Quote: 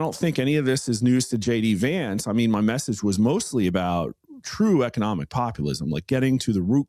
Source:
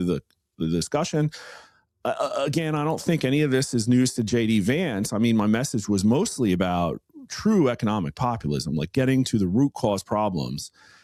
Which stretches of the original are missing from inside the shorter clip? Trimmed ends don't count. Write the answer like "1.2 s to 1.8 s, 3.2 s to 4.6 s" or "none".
none